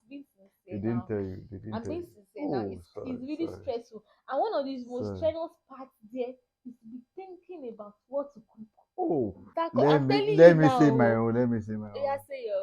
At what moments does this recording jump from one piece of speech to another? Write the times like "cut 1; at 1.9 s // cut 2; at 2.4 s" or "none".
cut 1; at 9.4 s